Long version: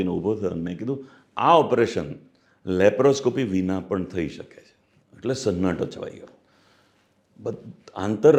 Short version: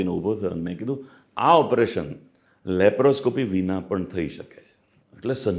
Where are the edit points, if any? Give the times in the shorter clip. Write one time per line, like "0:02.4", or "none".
none